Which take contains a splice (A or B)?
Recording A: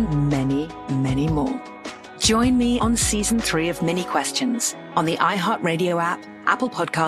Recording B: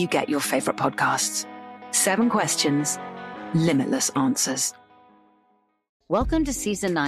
B